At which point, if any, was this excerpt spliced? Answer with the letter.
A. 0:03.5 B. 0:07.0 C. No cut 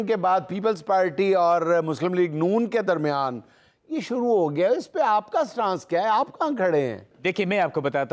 B